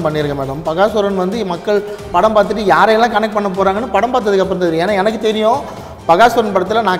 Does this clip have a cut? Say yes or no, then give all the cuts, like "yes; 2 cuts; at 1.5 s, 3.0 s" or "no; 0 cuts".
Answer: no; 0 cuts